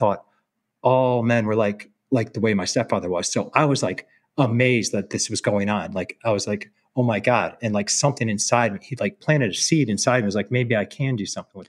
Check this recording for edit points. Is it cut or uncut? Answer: cut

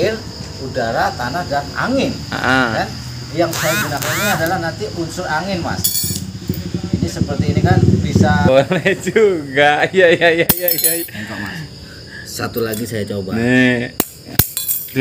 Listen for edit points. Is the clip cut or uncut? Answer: cut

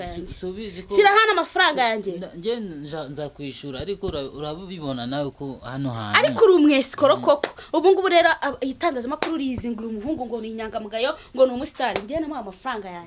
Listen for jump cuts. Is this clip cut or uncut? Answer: uncut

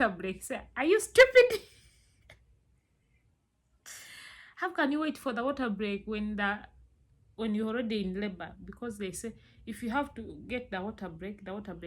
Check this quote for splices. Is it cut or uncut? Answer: uncut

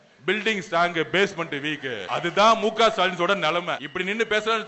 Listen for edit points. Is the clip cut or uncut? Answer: cut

